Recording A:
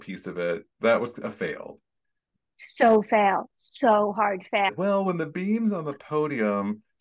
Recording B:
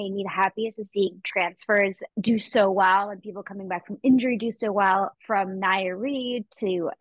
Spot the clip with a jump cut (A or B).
A